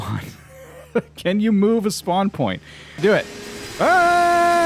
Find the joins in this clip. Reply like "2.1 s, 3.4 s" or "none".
3.0 s